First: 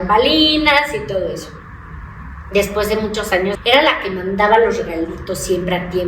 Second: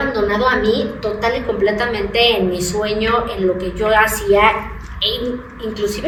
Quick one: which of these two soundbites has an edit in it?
first; 1 cut; at 3.6 s

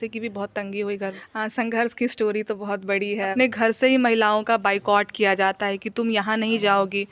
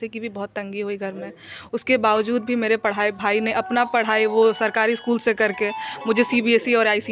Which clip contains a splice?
first; 2 cuts; at 1.2 s, 3.3 s

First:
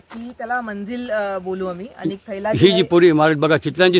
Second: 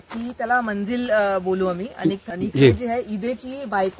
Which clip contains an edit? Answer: second; 1 cut; at 2.3 s

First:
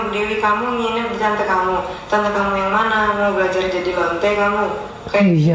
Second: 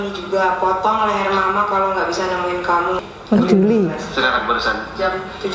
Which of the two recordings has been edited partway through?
second; 1 cut; at 3.0 s

